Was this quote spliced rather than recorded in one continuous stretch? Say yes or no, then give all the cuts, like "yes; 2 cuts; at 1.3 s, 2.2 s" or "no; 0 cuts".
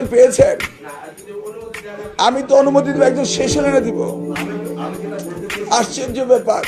no; 0 cuts